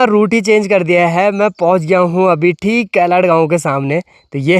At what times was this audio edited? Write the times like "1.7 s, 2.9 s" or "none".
none